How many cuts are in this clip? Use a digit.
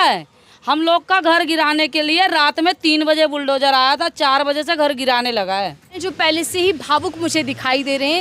1